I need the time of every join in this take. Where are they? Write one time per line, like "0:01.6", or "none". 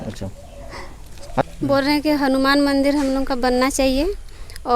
0:01.4